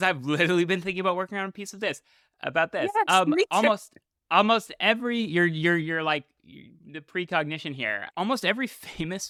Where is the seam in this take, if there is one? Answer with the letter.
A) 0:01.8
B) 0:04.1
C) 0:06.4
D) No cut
D